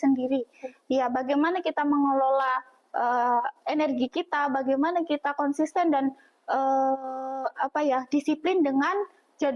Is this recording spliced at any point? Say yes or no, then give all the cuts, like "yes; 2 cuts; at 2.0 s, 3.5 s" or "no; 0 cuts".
no; 0 cuts